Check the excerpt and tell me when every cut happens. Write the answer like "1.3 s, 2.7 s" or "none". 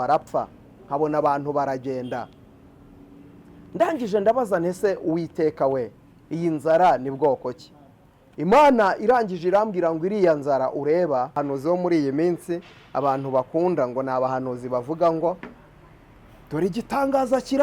11.4 s